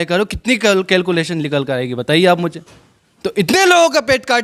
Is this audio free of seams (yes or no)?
yes